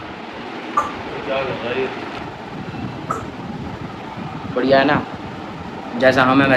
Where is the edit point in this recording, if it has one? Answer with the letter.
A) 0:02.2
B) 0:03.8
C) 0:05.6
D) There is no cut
D